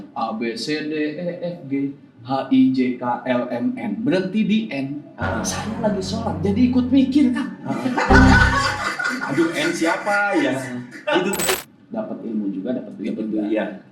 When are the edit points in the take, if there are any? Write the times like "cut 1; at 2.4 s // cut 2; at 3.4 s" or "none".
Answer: cut 1; at 11.7 s